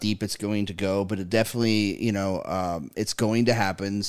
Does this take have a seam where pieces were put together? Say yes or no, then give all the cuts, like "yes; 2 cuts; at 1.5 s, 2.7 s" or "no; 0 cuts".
no; 0 cuts